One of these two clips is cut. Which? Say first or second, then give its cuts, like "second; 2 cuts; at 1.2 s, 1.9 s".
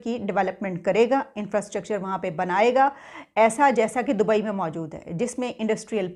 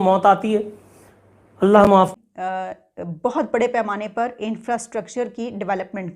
second; 1 cut; at 2.1 s